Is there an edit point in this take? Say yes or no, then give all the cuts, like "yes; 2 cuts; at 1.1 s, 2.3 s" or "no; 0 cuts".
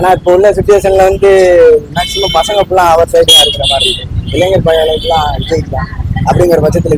no; 0 cuts